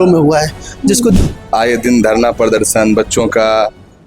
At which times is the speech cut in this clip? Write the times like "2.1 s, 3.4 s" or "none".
1.2 s